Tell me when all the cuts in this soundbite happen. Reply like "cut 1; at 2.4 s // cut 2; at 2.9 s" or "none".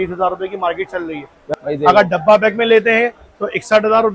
cut 1; at 1.4 s